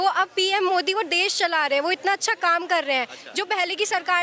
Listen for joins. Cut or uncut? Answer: uncut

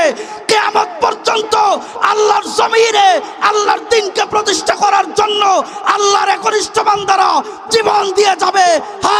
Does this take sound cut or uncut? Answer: uncut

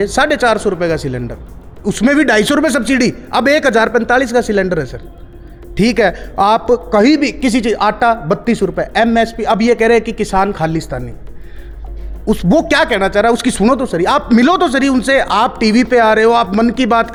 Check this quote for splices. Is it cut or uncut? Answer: uncut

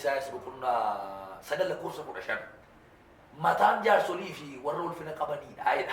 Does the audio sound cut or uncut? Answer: uncut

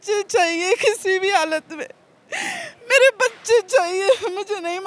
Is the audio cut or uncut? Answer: uncut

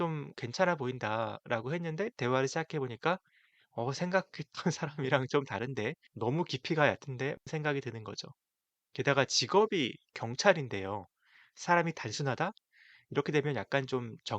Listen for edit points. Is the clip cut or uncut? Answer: cut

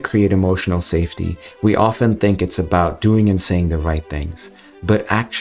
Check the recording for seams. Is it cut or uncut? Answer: uncut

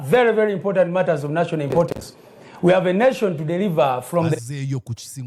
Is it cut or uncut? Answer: uncut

